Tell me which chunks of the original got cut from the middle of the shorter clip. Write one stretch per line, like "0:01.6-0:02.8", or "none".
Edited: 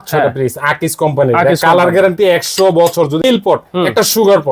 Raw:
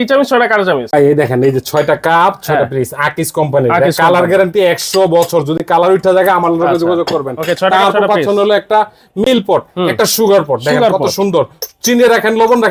0:05.6-0:09.2